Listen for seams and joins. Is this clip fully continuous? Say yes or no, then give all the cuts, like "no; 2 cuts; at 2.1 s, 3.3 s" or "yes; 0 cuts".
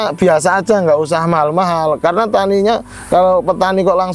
yes; 0 cuts